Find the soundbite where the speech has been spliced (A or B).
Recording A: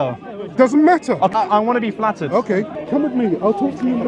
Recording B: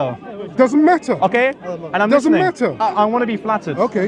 A